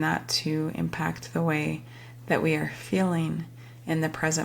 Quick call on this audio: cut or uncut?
uncut